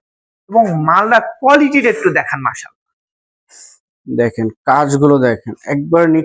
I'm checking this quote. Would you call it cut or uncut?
uncut